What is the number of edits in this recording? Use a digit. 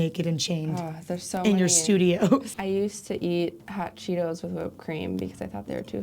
2